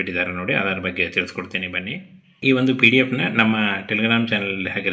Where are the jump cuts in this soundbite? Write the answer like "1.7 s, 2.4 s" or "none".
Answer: 2.4 s